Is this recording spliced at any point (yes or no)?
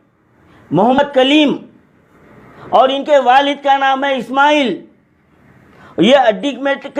yes